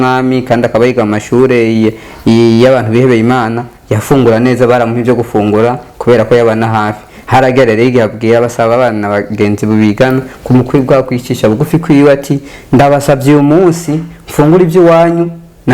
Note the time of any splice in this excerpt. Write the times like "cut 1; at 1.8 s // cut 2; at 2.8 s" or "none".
none